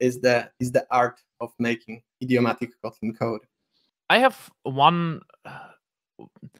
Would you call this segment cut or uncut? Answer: uncut